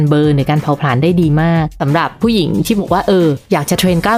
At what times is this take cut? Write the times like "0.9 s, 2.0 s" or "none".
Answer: 1.8 s